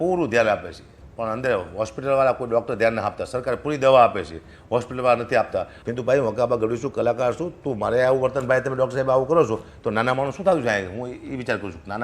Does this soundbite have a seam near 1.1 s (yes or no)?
no